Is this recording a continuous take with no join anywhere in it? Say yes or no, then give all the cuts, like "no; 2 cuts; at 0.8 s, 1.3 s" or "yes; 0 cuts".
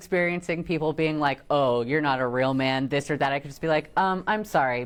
yes; 0 cuts